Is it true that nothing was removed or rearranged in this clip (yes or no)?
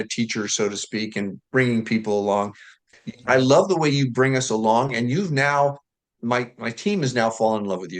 no